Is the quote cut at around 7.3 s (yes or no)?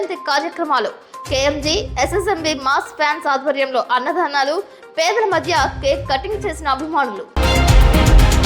yes